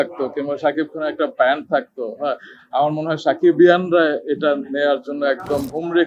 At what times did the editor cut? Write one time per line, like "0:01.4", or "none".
none